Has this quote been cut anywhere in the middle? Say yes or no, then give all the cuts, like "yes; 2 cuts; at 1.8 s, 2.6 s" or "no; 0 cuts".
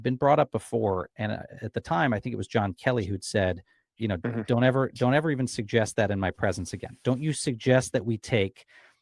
no; 0 cuts